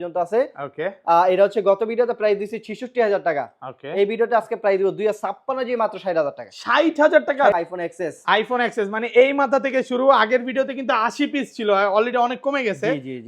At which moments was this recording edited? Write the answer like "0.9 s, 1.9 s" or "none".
7.5 s